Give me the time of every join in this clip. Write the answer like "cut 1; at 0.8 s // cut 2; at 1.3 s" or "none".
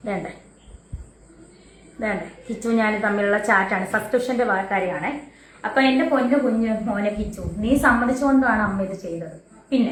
none